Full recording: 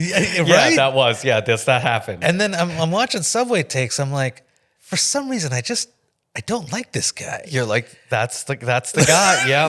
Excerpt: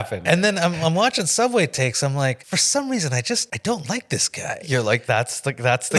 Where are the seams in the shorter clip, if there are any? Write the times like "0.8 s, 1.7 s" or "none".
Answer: 2.4 s, 3.5 s, 5.0 s